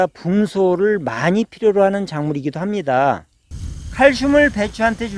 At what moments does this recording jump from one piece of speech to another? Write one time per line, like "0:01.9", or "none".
0:03.6